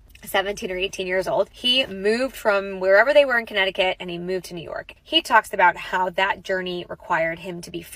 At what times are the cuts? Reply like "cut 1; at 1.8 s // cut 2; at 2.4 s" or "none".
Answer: none